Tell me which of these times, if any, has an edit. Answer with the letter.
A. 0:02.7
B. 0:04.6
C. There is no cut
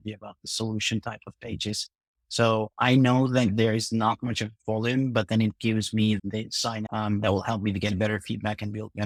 C